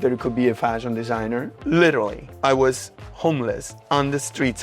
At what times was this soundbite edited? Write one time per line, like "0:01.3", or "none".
0:01.6
0:02.2
0:03.7